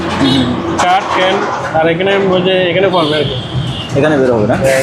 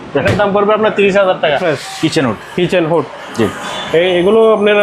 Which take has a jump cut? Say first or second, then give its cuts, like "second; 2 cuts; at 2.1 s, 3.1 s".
second; 1 cut; at 1.6 s